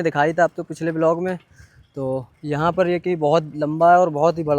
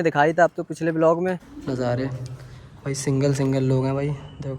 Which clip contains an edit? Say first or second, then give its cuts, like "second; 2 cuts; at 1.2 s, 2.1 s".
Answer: second; 1 cut; at 1.5 s